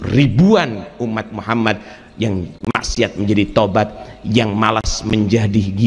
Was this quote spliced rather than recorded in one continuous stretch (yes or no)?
no